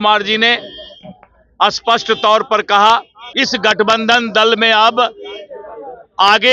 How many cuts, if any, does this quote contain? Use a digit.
1